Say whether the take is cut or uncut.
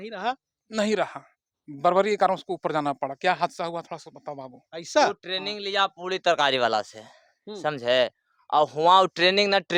uncut